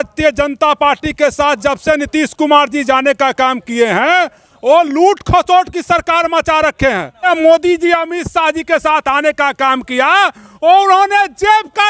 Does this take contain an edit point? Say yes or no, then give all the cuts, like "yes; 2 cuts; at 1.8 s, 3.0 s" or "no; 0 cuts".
yes; 1 cut; at 7.3 s